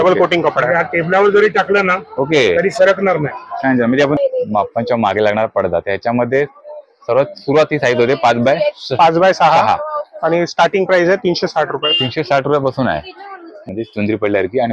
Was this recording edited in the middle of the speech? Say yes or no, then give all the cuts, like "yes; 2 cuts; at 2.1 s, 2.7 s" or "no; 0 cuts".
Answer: yes; 2 cuts; at 4.2 s, 13.7 s